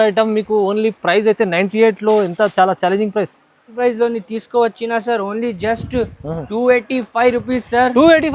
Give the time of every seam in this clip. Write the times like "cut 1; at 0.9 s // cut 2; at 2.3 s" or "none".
cut 1; at 3.6 s

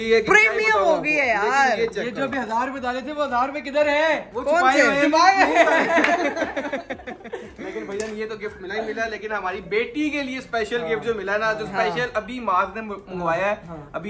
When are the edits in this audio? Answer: none

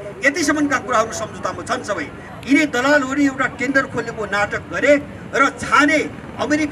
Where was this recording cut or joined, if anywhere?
cut 1; at 2.3 s

